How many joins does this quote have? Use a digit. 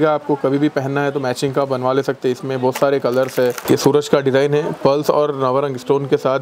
1